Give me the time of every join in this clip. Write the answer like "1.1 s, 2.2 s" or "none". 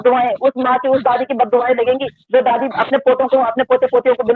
none